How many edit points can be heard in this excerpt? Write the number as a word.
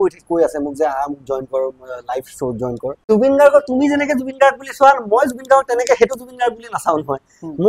one